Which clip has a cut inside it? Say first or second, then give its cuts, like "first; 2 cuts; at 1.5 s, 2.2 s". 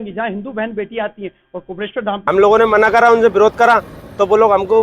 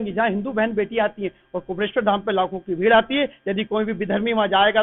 first; 1 cut; at 2.2 s